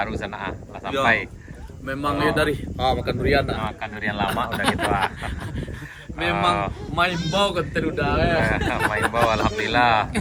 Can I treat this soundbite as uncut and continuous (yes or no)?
yes